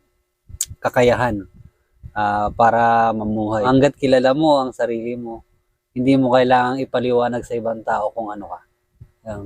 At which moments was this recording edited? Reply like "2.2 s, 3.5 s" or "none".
3.5 s

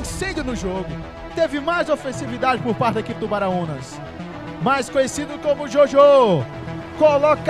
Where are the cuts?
none

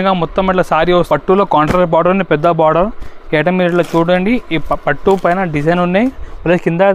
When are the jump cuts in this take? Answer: 1.1 s

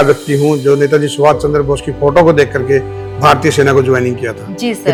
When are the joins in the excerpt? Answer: none

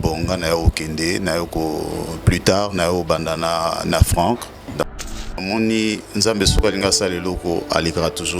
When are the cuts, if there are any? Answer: 4.9 s

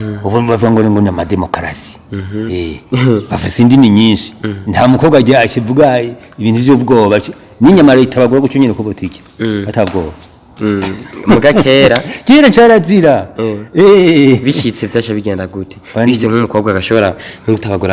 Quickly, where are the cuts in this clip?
none

